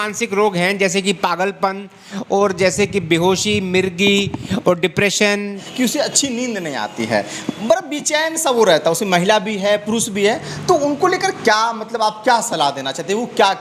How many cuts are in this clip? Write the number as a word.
one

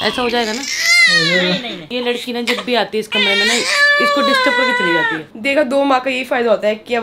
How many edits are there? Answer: two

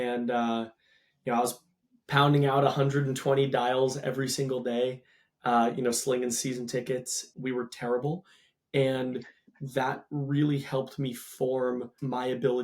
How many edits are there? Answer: one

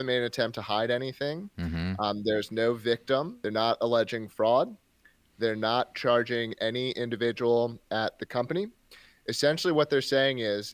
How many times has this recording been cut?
one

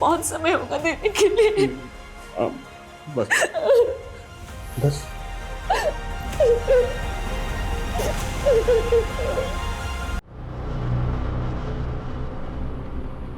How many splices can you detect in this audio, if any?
one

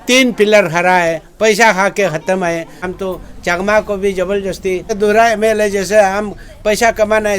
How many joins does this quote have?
two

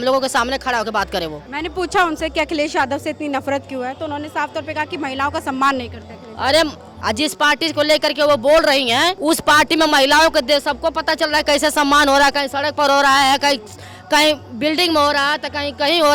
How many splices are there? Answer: three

